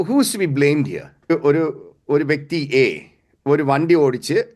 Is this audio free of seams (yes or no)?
no